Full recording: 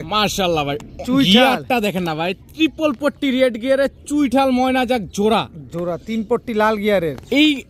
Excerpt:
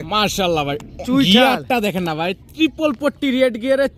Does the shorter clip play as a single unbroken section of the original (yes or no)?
yes